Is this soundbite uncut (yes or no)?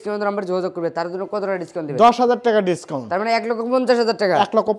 yes